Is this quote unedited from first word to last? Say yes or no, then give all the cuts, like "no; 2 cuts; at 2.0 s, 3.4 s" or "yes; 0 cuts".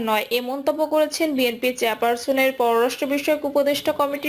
yes; 0 cuts